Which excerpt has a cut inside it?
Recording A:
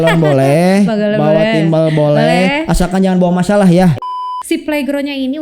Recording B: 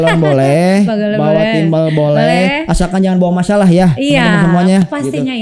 A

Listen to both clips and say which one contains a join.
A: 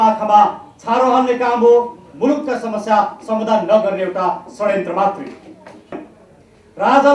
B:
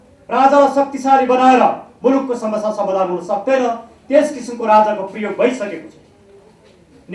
A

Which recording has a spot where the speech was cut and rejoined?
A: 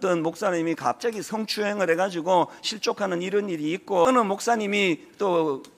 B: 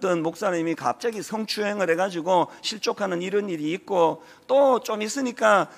A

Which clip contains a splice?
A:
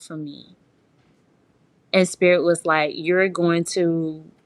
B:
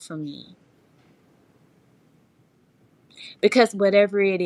A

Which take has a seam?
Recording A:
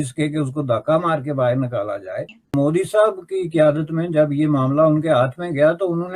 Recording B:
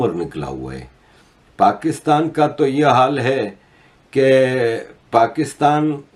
A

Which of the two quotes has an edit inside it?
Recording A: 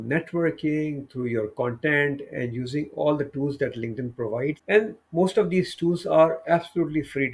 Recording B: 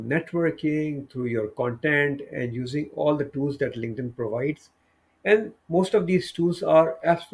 A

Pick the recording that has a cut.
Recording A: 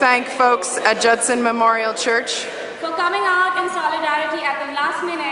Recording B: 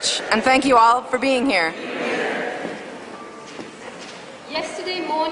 B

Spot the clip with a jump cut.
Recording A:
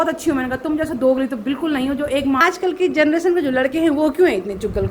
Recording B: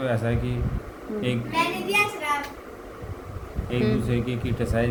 A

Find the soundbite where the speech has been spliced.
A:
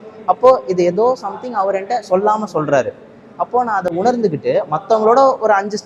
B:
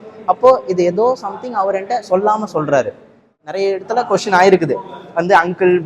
B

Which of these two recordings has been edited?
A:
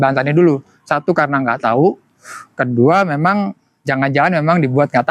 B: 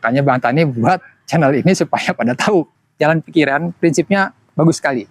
B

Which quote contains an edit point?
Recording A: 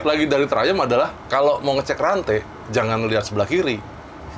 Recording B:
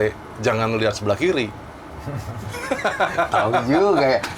A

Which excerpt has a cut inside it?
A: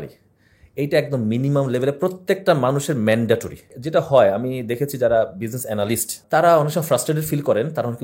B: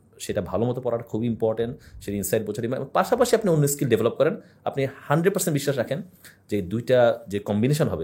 A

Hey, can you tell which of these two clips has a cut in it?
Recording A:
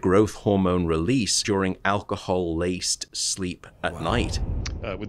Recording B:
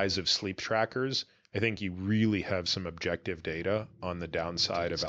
A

